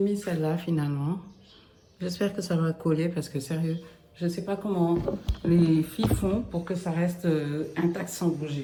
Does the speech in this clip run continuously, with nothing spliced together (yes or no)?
yes